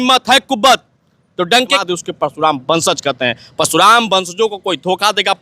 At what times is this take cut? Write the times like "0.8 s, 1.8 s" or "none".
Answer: 1.8 s